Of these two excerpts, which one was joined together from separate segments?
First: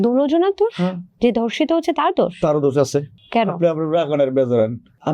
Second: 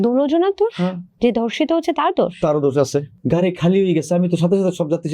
second; 1 cut; at 3.1 s

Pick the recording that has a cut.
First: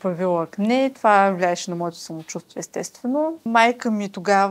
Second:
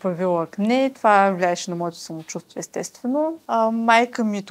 first; 1 cut; at 3.5 s

